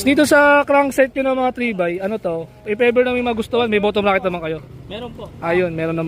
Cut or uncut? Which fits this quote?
uncut